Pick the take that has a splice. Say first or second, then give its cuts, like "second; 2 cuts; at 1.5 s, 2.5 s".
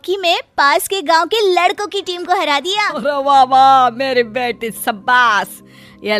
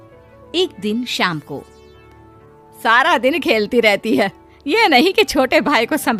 first; 1 cut; at 3.0 s